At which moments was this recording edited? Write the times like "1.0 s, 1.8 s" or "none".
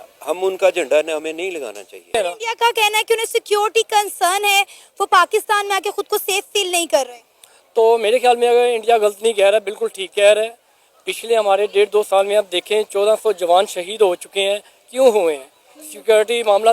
1.9 s